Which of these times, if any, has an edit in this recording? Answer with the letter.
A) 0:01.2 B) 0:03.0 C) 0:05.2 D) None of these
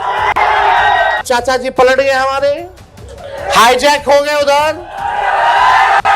A